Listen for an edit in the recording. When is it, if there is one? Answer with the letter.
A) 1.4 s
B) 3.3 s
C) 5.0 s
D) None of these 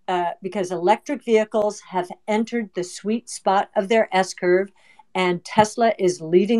D